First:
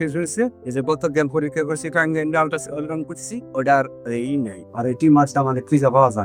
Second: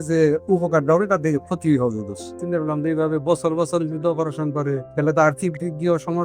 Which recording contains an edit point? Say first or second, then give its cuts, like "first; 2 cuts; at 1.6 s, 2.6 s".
second; 2 cuts; at 2.4 s, 4.9 s